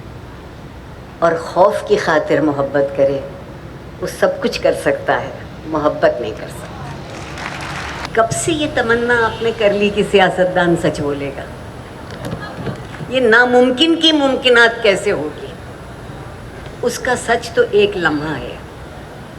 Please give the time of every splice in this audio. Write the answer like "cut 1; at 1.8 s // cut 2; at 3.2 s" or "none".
cut 1; at 8.1 s